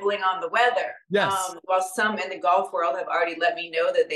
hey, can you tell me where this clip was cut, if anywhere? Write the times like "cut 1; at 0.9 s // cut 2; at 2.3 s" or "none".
cut 1; at 1.3 s